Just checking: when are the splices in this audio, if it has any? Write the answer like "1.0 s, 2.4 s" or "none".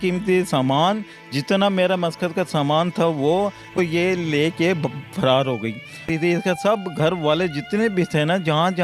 3.8 s, 6.0 s